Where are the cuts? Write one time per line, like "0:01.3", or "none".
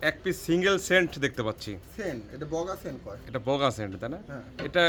none